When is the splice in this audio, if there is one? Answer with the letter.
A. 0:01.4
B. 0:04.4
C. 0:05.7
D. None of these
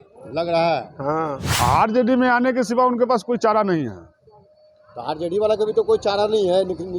A